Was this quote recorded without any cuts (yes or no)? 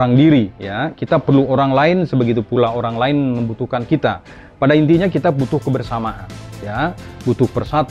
yes